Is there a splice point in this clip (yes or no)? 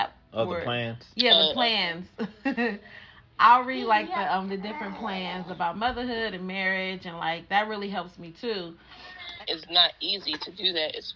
yes